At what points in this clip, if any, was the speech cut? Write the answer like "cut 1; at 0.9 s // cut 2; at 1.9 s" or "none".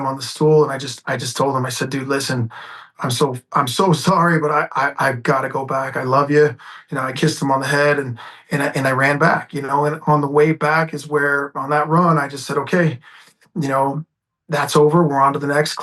none